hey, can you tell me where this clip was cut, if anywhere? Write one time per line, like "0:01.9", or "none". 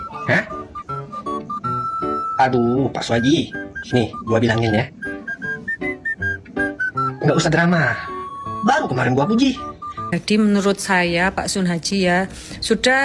0:10.1